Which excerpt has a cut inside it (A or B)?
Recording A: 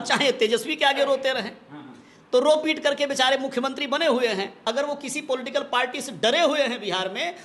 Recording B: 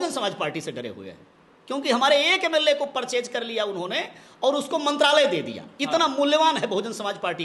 A